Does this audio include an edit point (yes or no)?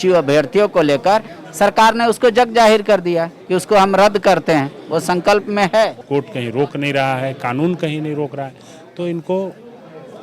yes